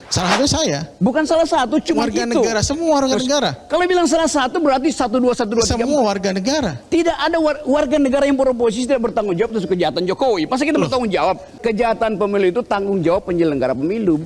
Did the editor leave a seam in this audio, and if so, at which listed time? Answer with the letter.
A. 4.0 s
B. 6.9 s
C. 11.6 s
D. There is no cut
C